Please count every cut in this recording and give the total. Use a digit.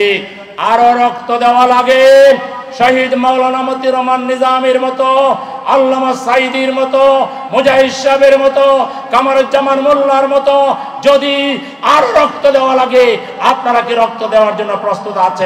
0